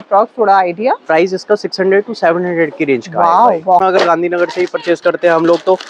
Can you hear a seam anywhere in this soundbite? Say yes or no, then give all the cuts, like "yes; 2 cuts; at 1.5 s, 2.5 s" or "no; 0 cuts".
yes; 1 cut; at 3.8 s